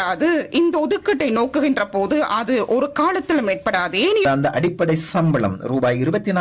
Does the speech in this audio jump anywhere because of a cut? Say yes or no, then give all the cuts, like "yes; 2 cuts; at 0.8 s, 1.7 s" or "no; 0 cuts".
yes; 1 cut; at 4.2 s